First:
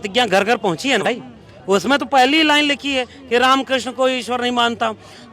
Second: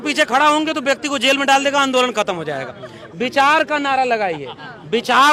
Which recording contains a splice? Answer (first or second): first